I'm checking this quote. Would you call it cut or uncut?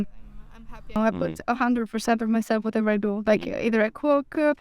cut